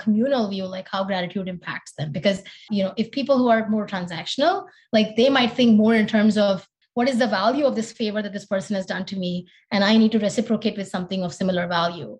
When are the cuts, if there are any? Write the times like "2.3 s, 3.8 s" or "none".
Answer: 2.6 s, 6.8 s

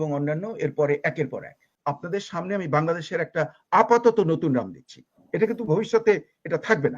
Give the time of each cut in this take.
1.6 s

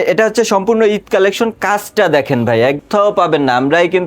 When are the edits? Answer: 2.8 s

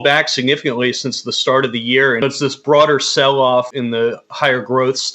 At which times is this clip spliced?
2.2 s, 3.7 s

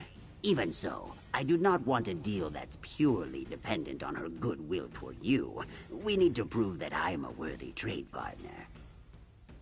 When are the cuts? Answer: 8.7 s

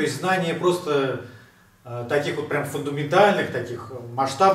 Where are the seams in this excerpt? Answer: none

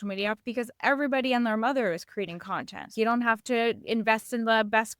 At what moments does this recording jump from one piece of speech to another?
2.9 s

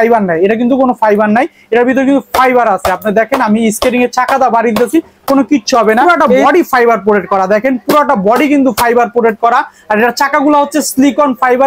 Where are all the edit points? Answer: 6.2 s

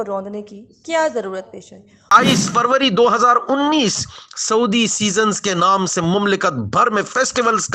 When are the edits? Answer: 2.0 s

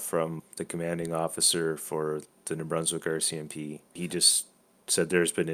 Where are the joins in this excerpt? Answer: 2.3 s, 3.9 s

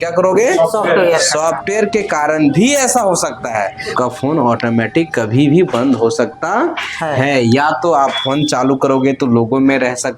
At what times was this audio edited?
3.9 s

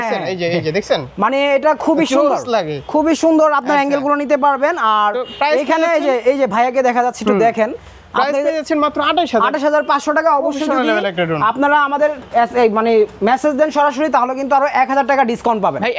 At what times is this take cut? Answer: none

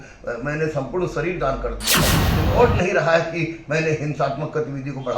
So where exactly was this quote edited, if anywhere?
2.2 s

